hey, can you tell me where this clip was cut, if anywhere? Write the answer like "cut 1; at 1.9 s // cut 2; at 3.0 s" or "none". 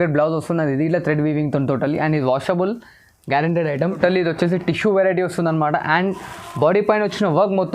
cut 1; at 4.0 s